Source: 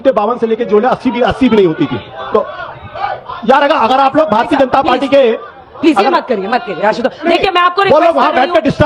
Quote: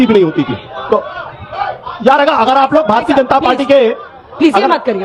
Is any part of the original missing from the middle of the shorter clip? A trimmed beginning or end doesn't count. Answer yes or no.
no